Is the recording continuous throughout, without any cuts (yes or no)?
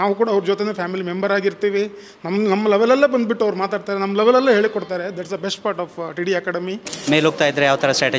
no